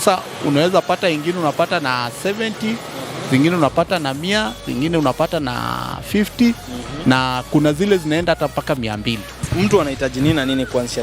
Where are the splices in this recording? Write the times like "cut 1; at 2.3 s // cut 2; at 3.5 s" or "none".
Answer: cut 1; at 9.3 s